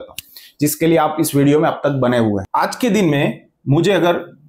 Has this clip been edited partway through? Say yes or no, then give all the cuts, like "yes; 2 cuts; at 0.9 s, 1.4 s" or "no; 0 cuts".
no; 0 cuts